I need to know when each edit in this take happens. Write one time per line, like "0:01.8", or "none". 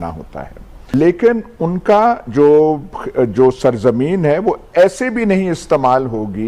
0:00.9